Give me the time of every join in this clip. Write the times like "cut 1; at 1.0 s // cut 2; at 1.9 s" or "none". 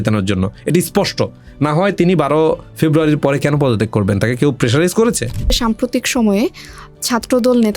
cut 1; at 5.6 s